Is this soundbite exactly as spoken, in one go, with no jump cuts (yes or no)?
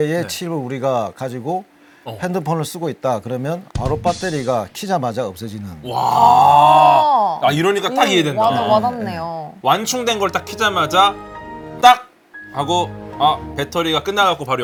yes